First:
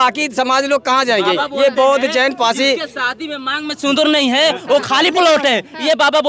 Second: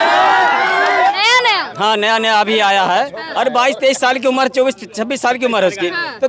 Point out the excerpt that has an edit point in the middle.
second; 1 cut; at 1.1 s

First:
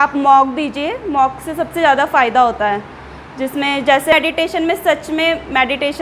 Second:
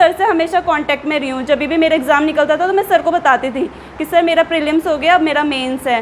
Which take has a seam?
first; 1 cut; at 4.1 s

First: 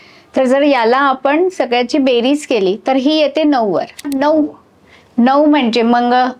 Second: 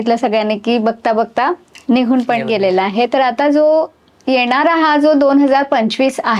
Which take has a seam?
first; 1 cut; at 4.2 s

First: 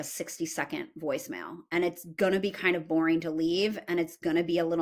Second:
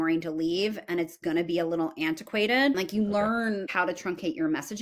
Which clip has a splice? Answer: second; 1 cut; at 2.8 s

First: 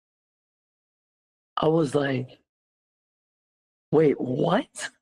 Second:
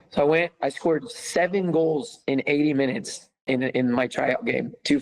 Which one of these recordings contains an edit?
second; 1 cut; at 3.4 s

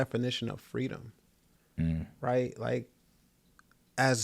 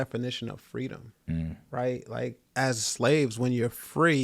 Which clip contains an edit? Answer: second; 2 cuts; at 1.1 s, 2.4 s

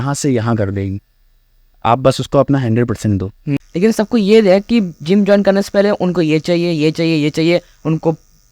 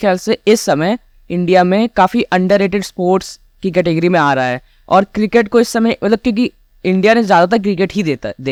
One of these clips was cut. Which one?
first; 1 cut; at 3.5 s

